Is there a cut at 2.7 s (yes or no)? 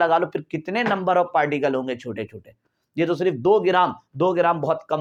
no